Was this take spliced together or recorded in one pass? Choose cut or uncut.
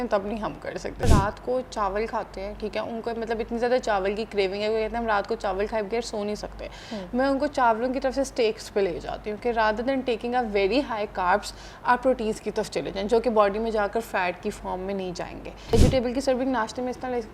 cut